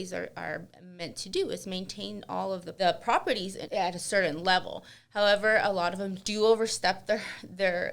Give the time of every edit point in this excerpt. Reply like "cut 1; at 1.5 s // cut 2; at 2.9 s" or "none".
cut 1; at 2.7 s // cut 2; at 3.6 s

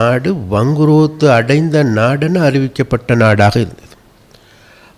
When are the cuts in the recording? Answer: none

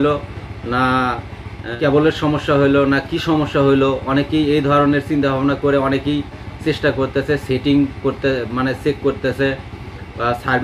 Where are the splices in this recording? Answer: cut 1; at 1.6 s

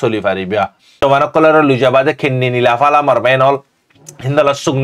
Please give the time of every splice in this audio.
cut 1; at 1.0 s

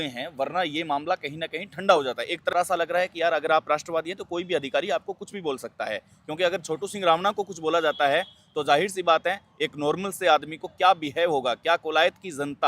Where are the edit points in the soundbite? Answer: cut 1; at 2.5 s

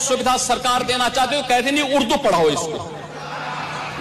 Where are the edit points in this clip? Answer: none

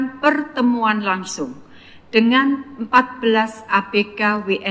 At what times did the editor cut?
none

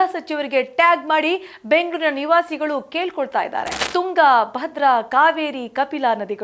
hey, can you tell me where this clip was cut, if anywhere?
cut 1; at 3.8 s

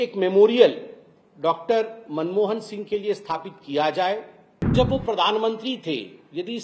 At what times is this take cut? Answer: cut 1; at 4.7 s

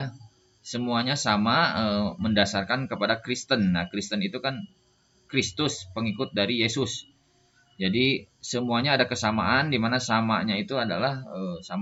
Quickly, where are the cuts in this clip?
none

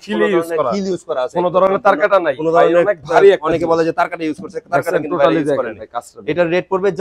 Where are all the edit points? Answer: none

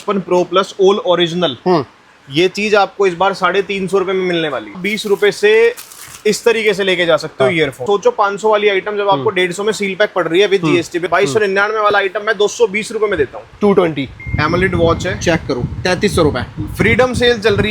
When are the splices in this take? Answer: cut 1; at 4.8 s // cut 2; at 7.8 s // cut 3; at 11.1 s // cut 4; at 14.2 s

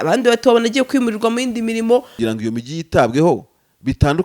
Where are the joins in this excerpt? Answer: cut 1; at 2.1 s

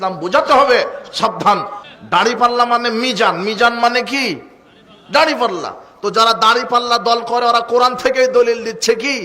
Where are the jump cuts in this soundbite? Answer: cut 1; at 1.8 s

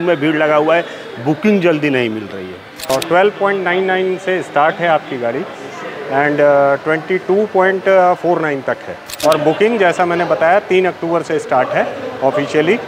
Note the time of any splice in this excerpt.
cut 1; at 2.9 s // cut 2; at 9.1 s

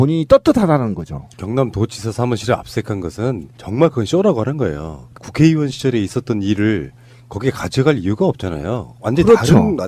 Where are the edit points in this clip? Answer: none

